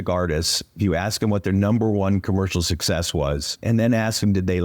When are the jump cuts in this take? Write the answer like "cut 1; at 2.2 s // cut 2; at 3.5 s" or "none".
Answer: cut 1; at 3.5 s